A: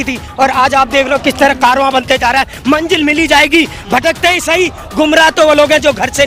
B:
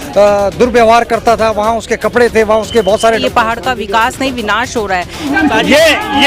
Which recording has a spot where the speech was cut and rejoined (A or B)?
B